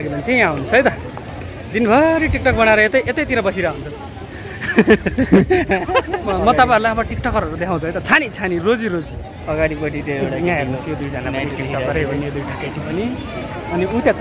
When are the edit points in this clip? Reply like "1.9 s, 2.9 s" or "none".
6.3 s